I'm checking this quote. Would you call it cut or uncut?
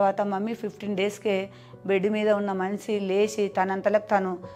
uncut